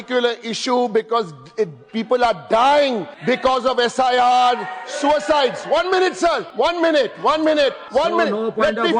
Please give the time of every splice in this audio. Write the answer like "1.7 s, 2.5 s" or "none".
3.1 s, 6.5 s, 7.8 s